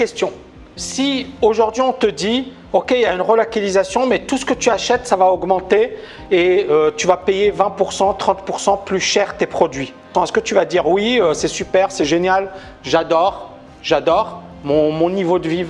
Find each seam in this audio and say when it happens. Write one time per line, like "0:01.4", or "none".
0:10.0